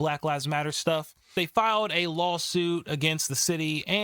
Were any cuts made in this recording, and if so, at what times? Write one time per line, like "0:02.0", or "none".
0:01.3